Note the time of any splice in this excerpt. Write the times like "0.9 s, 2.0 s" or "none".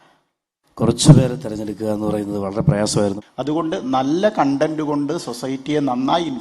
3.2 s

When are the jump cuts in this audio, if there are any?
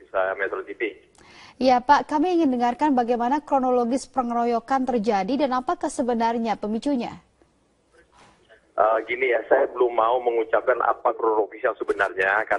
9.1 s

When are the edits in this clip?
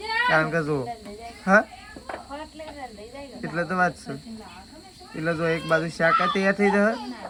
none

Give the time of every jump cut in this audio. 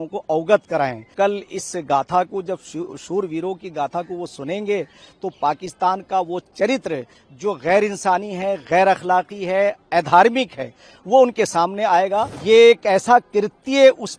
1.1 s, 12.3 s

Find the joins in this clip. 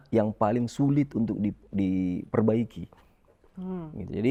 none

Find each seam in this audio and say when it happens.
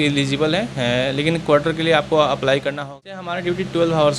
2.8 s

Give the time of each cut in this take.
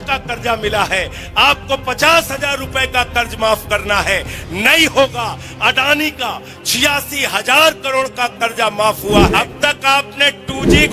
9.3 s

